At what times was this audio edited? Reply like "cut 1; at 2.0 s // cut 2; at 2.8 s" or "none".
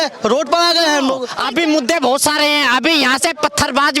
cut 1; at 1.3 s